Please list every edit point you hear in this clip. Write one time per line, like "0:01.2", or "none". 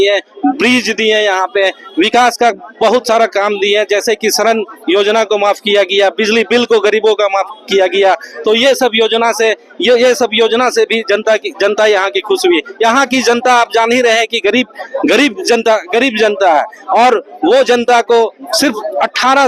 none